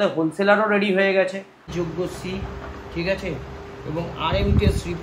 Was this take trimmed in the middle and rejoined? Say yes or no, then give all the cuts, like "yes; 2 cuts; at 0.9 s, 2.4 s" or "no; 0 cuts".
yes; 1 cut; at 1.6 s